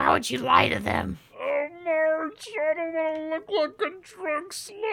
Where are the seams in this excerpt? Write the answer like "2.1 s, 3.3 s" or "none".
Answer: 1.2 s

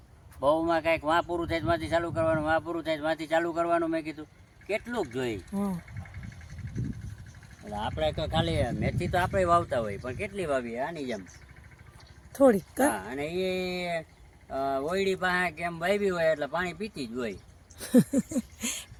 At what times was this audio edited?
none

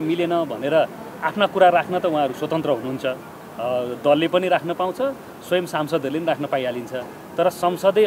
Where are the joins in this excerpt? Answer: none

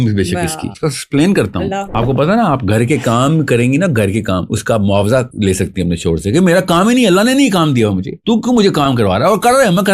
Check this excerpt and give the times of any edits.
1.9 s

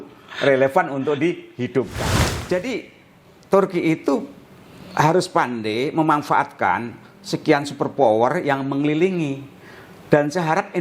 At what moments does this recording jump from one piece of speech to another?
2.0 s

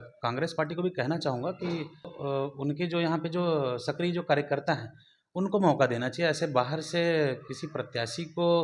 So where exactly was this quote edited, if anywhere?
2.1 s

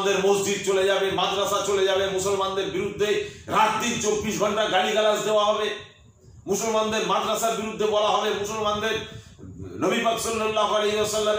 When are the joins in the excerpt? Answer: none

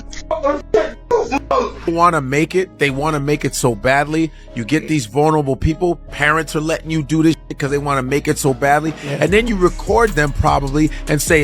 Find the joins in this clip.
1.9 s

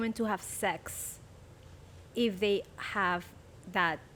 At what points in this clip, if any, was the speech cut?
none

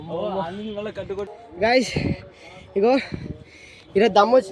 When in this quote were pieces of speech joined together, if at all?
1.4 s

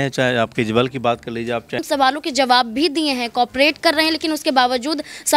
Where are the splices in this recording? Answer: 1.8 s

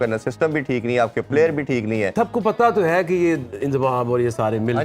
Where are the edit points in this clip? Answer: 2.1 s

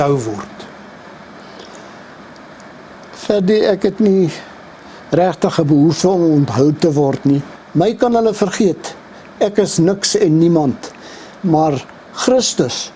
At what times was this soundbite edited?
7.6 s

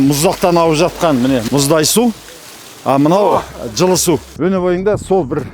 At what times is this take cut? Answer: 1.4 s, 4.3 s

